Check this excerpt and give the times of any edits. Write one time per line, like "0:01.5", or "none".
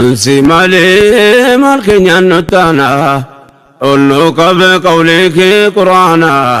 none